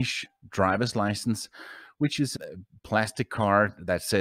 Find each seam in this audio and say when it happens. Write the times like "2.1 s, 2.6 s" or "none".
none